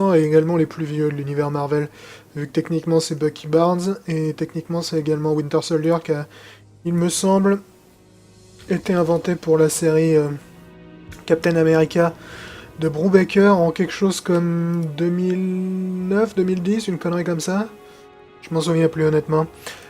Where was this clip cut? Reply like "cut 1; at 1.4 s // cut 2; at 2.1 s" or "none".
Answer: cut 1; at 2.9 s